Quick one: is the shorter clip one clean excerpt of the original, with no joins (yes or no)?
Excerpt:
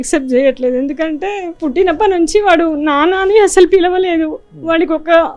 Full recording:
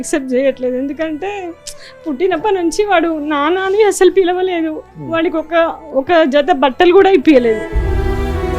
no